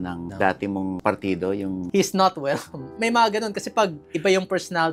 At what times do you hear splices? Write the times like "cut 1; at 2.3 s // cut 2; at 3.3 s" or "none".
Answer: cut 1; at 1.0 s // cut 2; at 1.8 s // cut 3; at 2.9 s